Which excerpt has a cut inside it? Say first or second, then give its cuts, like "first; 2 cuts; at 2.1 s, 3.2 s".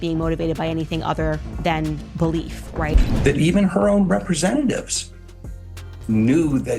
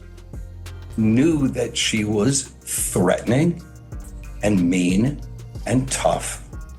first; 1 cut; at 2.9 s